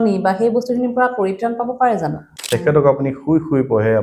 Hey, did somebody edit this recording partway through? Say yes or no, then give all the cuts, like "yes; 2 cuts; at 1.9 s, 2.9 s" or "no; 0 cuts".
yes; 1 cut; at 2.3 s